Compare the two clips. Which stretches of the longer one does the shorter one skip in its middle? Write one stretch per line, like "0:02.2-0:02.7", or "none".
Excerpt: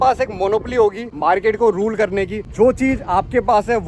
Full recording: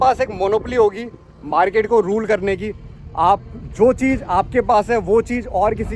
0:01.1-0:01.4
0:02.7-0:03.6